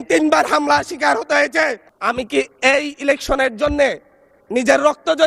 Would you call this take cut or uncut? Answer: cut